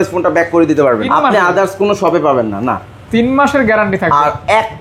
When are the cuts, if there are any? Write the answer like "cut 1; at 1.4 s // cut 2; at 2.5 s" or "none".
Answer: cut 1; at 1.0 s